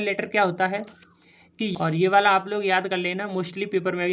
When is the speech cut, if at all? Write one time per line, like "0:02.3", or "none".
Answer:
0:01.7